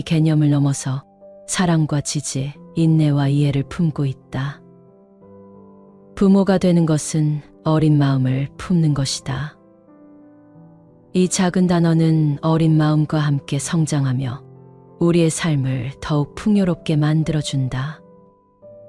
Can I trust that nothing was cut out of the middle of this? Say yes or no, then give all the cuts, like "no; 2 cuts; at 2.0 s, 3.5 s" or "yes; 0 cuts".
no; 1 cut; at 18.0 s